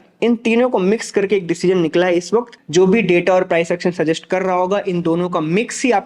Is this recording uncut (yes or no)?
no